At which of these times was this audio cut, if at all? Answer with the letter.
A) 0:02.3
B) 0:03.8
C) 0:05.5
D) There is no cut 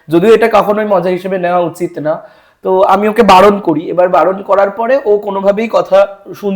D